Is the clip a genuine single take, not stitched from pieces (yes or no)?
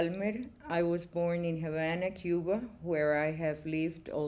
yes